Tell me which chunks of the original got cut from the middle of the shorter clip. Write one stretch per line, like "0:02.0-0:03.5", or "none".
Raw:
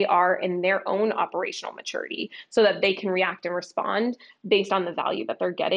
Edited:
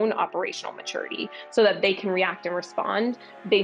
none